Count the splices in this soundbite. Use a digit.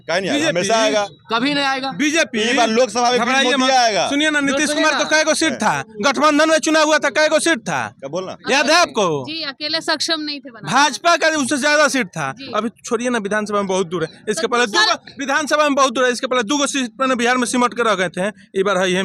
0